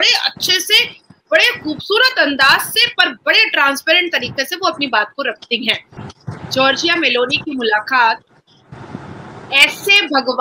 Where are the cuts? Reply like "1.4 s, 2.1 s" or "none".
6.0 s